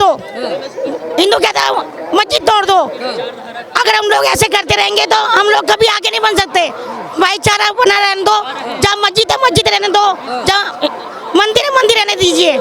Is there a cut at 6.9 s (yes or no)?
no